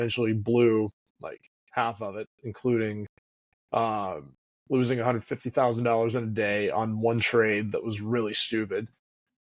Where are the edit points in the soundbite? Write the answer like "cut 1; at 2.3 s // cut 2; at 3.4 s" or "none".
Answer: none